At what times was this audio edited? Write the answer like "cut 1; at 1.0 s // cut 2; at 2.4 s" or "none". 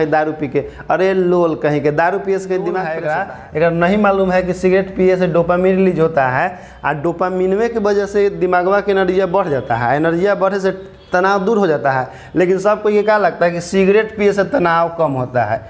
cut 1; at 2.9 s

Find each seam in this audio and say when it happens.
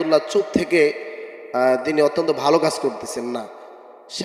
none

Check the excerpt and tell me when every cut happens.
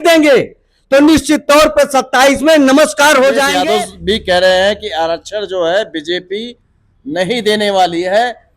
cut 1; at 3.6 s

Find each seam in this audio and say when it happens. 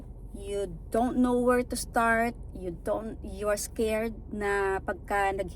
none

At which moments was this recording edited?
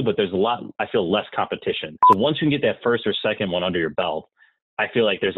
cut 1; at 1.9 s

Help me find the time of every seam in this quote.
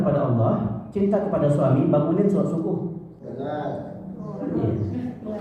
cut 1; at 3.3 s

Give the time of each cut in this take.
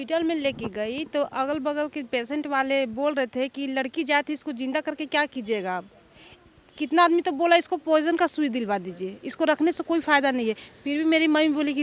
none

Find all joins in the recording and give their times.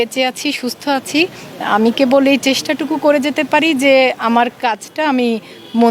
none

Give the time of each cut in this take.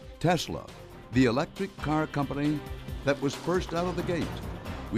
none

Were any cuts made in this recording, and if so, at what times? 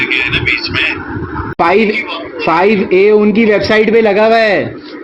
cut 1; at 1.5 s

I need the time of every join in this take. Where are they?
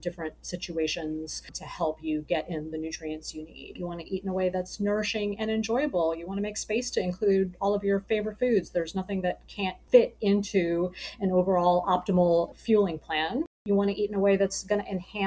cut 1; at 9.8 s

